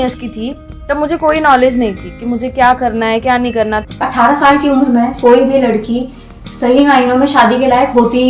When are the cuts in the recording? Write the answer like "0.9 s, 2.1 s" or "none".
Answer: 4.0 s